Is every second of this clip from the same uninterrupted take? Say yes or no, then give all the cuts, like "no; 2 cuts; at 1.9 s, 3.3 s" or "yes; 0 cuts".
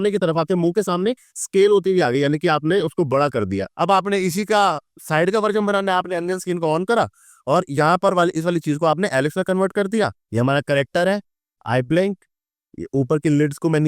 no; 2 cuts; at 3.7 s, 10.2 s